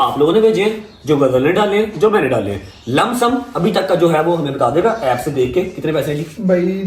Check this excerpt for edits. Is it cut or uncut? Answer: uncut